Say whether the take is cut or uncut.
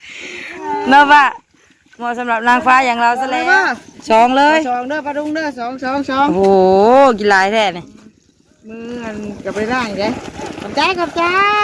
cut